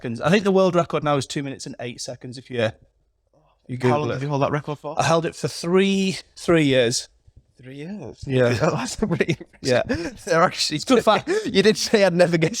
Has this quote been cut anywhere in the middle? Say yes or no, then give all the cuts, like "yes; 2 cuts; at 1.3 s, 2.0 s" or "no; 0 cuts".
no; 0 cuts